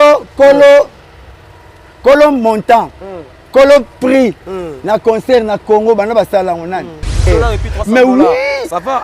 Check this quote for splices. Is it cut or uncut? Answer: cut